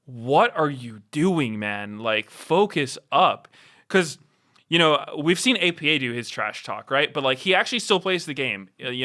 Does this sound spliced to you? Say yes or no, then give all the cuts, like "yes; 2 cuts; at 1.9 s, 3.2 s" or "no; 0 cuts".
no; 0 cuts